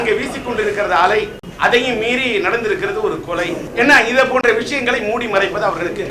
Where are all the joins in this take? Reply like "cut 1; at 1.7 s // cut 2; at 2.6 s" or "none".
cut 1; at 1.4 s // cut 2; at 3.6 s